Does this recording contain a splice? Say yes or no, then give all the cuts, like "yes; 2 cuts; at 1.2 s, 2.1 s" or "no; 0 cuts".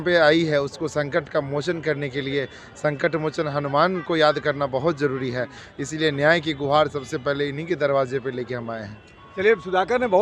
no; 0 cuts